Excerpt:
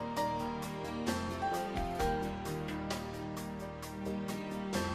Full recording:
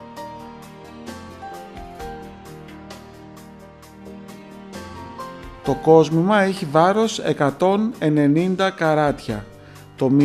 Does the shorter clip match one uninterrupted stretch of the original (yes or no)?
yes